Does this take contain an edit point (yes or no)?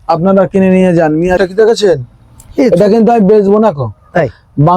yes